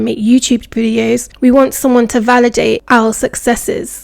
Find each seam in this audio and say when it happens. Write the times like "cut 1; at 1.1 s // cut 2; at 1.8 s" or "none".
cut 1; at 1.3 s // cut 2; at 2.8 s